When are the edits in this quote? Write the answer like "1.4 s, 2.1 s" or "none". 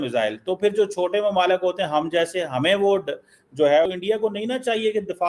3.9 s